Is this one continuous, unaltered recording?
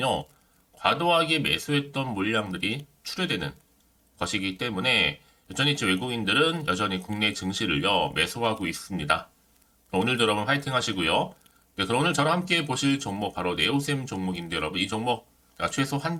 yes; 0 cuts

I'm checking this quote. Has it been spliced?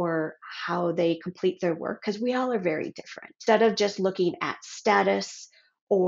yes; 1 cut; at 3.4 s

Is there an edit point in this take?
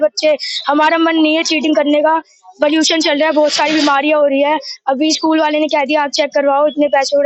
no; 0 cuts

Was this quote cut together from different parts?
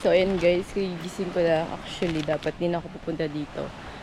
no; 0 cuts

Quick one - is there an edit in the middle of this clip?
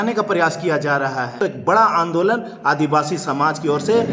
yes; 1 cut; at 1.4 s

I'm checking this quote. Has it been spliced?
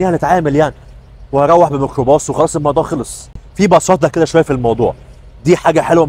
no; 0 cuts

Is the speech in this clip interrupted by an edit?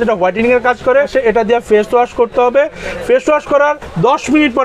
yes; 1 cut; at 1.1 s

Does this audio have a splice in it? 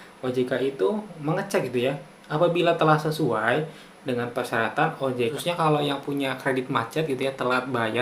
yes; 1 cut; at 5.3 s

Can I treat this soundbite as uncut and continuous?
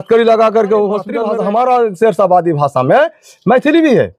no; 1 cut; at 1.2 s

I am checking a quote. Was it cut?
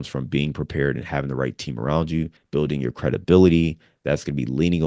no; 0 cuts

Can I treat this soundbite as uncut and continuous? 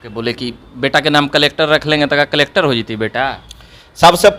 yes; 0 cuts

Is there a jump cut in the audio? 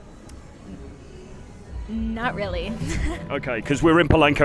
yes; 1 cut; at 3.2 s

